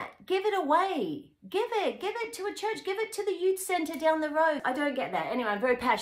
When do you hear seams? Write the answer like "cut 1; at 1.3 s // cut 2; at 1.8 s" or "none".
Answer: cut 1; at 4.6 s